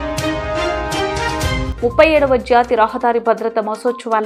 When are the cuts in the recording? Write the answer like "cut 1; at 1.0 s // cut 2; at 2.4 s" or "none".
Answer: none